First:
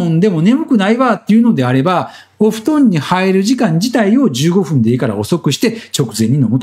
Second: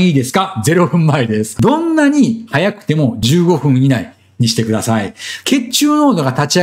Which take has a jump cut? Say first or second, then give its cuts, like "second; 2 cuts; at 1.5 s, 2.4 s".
second; 1 cut; at 1.5 s